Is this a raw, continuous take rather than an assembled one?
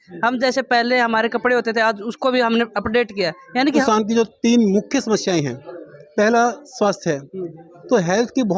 no; 1 cut; at 3.8 s

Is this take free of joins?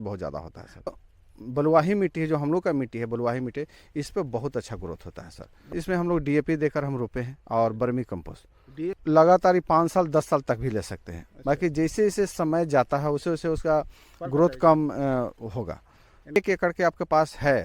no; 4 cuts; at 1.0 s, 5.7 s, 9.0 s, 16.4 s

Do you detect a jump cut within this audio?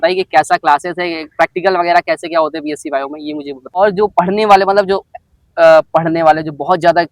yes; 1 cut; at 3.8 s

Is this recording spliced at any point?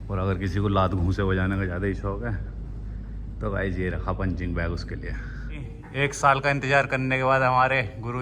yes; 1 cut; at 5.8 s

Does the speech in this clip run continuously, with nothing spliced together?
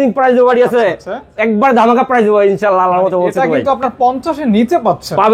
yes; 0 cuts

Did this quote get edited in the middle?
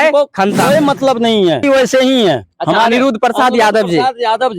yes; 1 cut; at 1.6 s

